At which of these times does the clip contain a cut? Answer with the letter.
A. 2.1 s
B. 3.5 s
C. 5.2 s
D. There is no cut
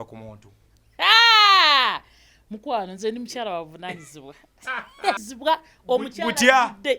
C